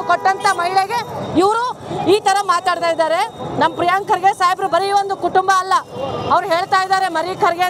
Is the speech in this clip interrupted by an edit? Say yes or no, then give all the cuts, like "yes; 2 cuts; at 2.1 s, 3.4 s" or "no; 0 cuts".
no; 0 cuts